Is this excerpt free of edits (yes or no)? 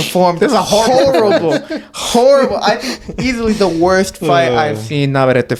yes